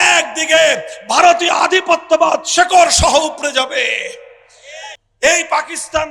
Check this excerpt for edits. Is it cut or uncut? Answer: cut